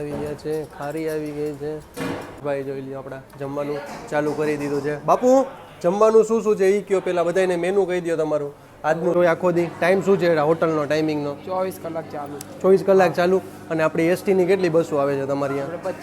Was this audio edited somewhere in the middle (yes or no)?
yes